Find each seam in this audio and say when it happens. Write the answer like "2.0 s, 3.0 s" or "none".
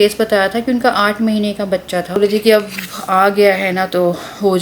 2.2 s